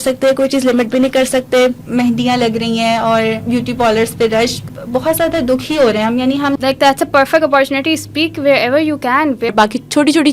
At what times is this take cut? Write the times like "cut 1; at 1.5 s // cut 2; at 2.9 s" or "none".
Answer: cut 1; at 1.8 s // cut 2; at 4.7 s // cut 3; at 6.6 s // cut 4; at 9.5 s